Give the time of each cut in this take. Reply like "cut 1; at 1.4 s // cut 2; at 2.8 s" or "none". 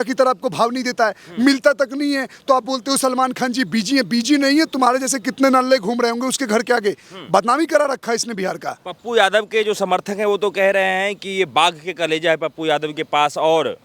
none